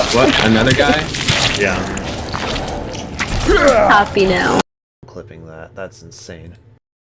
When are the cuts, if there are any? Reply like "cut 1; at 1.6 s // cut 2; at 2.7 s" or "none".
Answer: none